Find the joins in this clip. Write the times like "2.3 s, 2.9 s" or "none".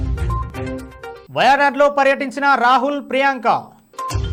none